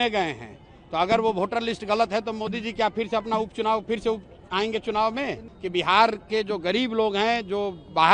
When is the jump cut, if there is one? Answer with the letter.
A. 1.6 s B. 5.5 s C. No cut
B